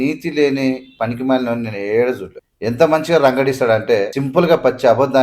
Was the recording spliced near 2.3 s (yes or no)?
yes